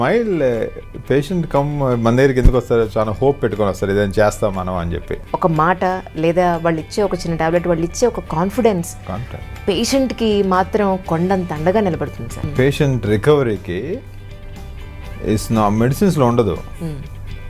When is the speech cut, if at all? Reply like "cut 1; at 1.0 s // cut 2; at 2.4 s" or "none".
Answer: cut 1; at 5.2 s // cut 2; at 12.4 s